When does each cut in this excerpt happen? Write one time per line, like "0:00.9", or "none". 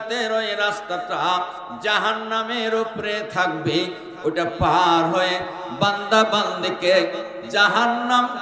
none